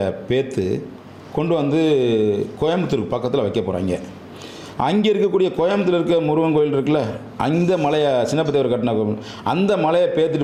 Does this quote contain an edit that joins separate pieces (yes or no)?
no